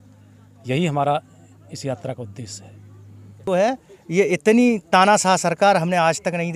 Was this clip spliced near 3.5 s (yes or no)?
yes